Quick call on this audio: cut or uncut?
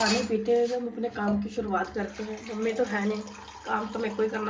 uncut